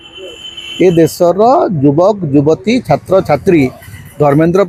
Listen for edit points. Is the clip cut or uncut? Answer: uncut